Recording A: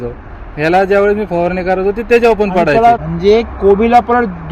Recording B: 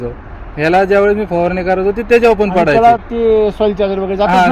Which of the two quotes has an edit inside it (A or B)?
A